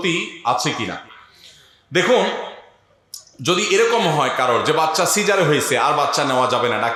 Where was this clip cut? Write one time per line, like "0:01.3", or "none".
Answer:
none